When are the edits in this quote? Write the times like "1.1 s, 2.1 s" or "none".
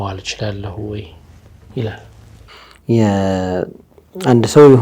none